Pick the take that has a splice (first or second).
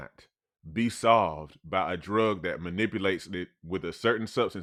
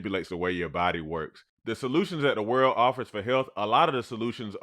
second